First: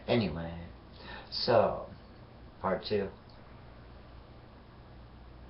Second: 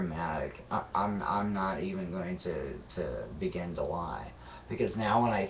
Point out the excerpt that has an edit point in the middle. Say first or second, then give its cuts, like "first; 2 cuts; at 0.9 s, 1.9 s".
second; 1 cut; at 1.3 s